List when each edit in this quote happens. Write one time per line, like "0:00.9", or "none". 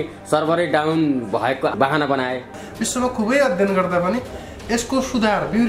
0:02.6